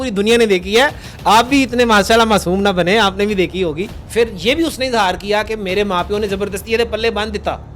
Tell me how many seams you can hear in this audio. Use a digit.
1